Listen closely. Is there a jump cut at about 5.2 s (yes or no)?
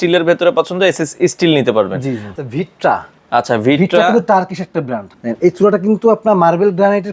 yes